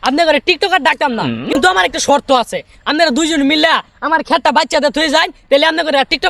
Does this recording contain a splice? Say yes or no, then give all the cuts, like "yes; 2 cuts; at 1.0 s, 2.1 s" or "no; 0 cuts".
no; 0 cuts